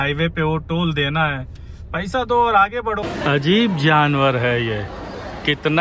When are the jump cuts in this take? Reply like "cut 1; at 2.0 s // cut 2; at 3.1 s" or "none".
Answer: cut 1; at 3.0 s